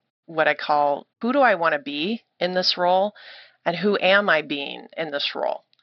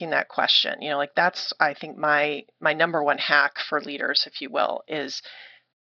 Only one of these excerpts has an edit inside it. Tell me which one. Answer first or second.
first